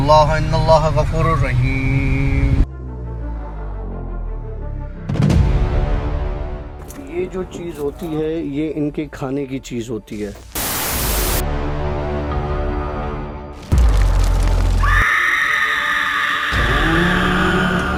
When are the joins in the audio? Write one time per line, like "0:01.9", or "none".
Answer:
none